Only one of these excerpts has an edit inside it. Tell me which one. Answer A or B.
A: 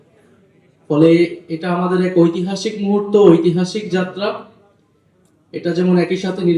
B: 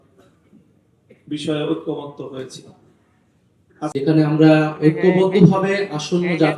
B